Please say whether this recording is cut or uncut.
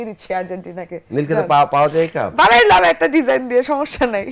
uncut